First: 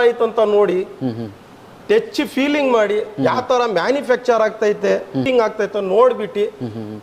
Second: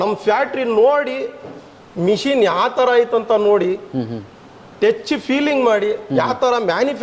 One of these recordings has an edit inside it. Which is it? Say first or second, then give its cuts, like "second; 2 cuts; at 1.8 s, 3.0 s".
first; 1 cut; at 5.2 s